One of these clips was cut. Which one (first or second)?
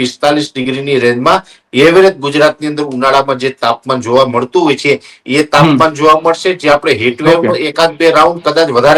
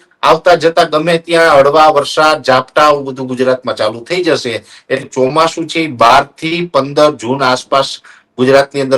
second